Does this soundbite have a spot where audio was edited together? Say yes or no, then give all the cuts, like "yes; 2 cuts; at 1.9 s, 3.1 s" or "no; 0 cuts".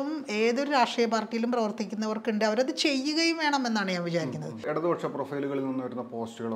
yes; 1 cut; at 4.6 s